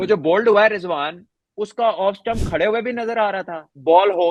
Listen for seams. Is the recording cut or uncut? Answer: uncut